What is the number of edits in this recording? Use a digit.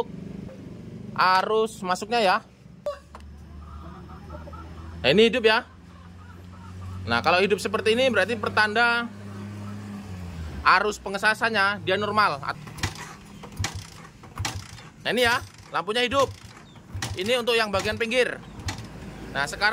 2